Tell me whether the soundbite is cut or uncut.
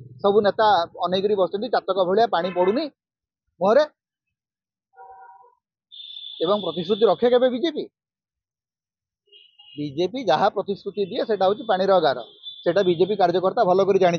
uncut